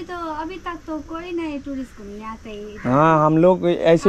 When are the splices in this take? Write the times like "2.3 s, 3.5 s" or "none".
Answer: none